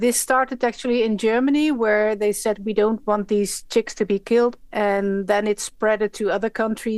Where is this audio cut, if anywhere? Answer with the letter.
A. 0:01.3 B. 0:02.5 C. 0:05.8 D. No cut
D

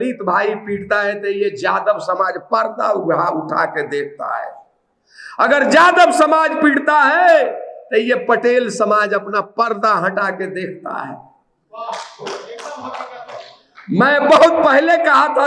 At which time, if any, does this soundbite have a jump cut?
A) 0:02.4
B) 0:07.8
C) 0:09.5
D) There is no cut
D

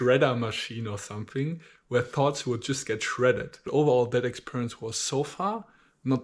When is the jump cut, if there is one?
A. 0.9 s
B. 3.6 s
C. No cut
B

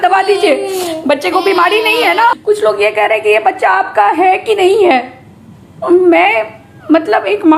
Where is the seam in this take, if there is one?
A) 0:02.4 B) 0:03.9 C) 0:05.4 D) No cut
A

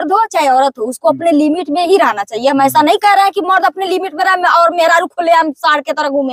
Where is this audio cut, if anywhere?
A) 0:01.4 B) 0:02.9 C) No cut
C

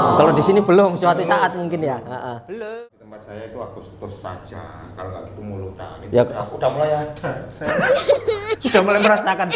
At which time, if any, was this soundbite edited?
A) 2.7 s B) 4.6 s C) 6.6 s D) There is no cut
A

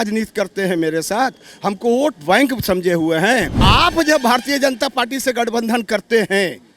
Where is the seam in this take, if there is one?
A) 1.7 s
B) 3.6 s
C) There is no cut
B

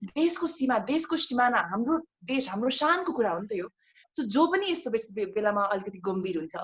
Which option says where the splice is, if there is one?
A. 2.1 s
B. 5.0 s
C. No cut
C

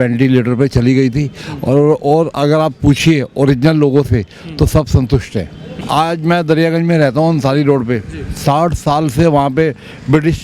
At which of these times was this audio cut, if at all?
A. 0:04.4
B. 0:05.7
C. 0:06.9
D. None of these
B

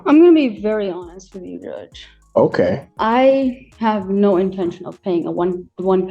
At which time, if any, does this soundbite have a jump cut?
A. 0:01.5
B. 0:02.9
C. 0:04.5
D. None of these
B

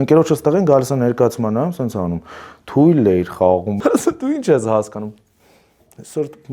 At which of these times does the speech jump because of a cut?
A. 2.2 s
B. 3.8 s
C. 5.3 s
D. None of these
B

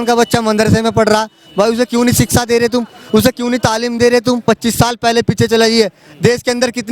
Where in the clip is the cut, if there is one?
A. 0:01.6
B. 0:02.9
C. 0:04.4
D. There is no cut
C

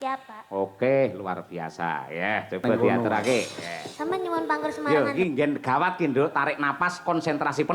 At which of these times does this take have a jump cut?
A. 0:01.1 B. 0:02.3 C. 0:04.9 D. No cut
C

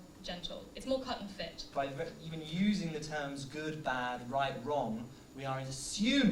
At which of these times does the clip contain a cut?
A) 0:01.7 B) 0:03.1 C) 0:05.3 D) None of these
A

